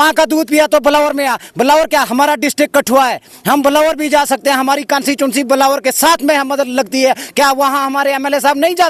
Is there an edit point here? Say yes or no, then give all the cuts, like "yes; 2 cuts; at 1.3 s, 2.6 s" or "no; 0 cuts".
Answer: no; 0 cuts